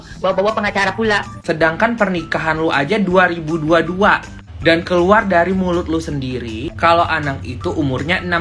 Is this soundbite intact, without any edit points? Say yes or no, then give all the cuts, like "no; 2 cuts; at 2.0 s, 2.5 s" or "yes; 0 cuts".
no; 1 cut; at 1.3 s